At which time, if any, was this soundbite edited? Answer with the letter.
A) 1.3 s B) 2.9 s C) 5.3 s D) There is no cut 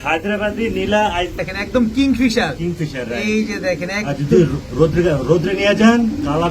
A